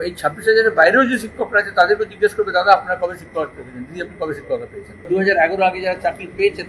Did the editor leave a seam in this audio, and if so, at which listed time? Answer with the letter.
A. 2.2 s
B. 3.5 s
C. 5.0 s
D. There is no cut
C